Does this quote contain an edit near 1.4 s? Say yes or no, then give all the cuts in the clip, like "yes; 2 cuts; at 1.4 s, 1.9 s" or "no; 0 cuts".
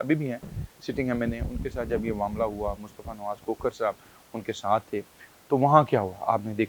no; 0 cuts